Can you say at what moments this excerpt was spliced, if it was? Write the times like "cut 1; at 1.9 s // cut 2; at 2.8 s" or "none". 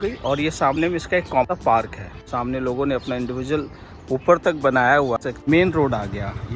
cut 1; at 2.1 s // cut 2; at 5.4 s